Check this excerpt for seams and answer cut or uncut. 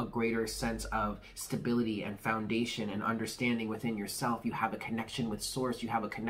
uncut